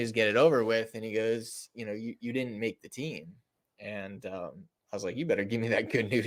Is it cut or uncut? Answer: uncut